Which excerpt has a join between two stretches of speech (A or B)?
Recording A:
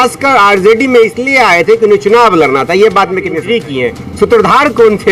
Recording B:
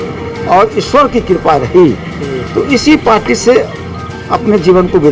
A